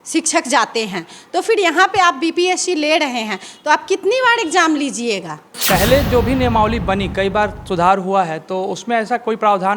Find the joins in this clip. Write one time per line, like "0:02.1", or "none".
0:05.6